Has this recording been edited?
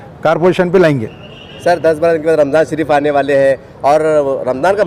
no; 0 cuts

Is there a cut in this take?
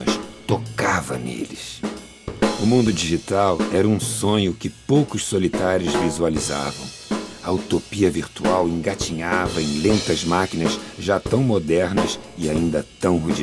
yes; 1 cut; at 7.3 s

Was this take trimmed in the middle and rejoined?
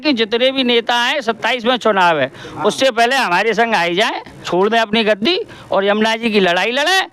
yes; 1 cut; at 4.5 s

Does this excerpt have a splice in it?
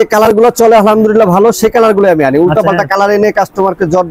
no; 0 cuts

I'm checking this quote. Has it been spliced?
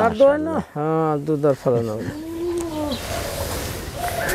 no; 0 cuts

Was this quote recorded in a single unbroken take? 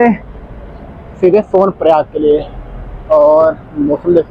yes; 0 cuts

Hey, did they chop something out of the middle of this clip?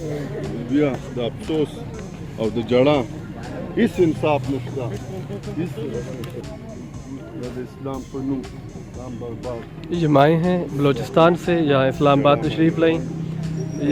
yes; 1 cut; at 6.4 s

